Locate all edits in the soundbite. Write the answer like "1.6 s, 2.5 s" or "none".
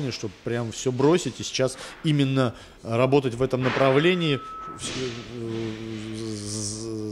none